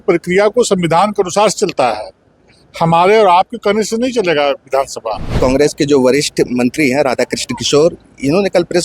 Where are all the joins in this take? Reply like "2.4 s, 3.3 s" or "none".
5.4 s